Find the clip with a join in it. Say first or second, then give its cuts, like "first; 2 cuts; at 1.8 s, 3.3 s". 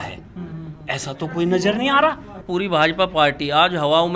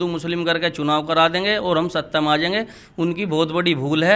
first; 1 cut; at 2.4 s